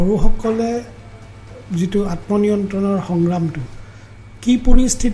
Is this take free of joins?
yes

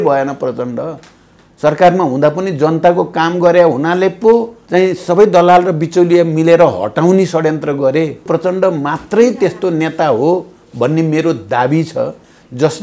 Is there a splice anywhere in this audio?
yes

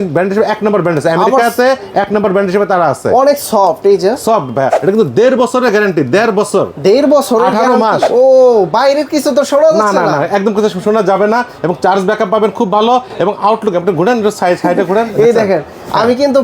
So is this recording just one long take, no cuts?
no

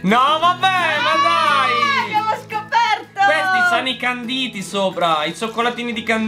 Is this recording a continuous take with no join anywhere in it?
yes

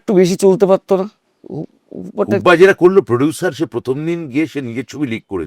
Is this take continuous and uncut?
yes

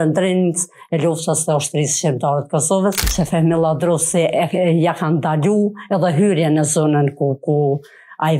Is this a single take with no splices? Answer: no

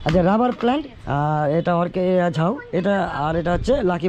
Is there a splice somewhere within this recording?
yes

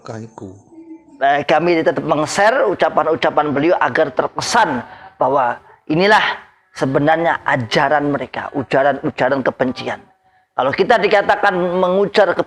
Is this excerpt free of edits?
no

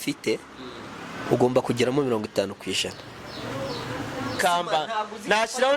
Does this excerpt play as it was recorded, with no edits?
no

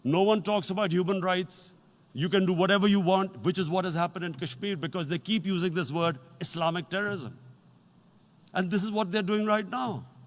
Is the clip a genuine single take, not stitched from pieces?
yes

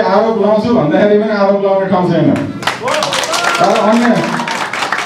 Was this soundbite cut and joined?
no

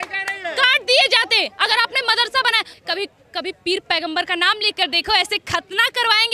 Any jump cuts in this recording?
yes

